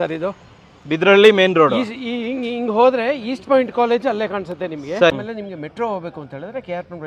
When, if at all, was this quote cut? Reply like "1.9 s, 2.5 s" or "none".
5.1 s

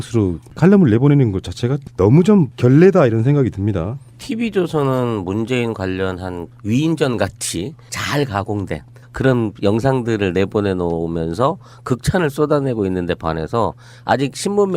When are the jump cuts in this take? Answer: 7.1 s

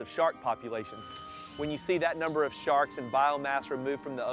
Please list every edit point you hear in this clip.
1.4 s

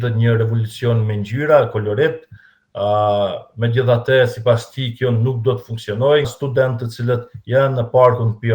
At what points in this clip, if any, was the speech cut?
6.3 s

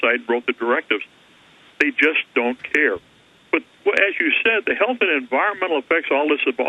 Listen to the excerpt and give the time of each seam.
none

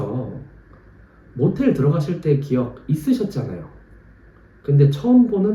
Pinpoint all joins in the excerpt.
none

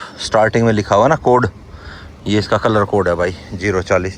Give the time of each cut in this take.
none

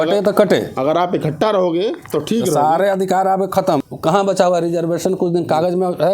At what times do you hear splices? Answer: 3.9 s

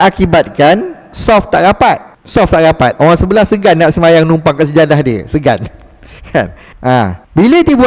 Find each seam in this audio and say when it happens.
none

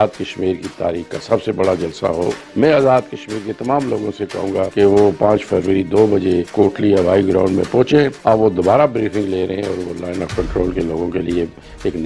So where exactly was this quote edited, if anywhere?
2.4 s, 4.7 s, 6.5 s, 8.2 s

